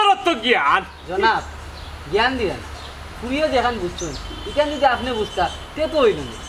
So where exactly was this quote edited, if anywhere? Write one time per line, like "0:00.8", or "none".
none